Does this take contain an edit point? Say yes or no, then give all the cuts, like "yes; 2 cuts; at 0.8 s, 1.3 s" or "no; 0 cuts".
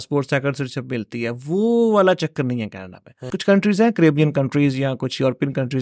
yes; 1 cut; at 3.3 s